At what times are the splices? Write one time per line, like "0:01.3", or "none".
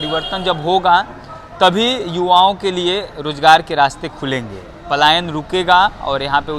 none